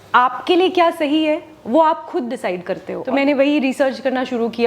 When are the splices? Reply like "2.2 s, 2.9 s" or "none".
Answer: 2.9 s